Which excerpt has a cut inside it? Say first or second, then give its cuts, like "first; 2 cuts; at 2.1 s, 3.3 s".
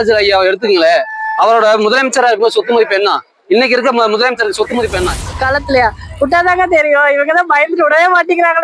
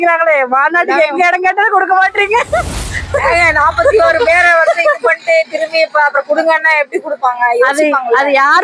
first; 1 cut; at 5.1 s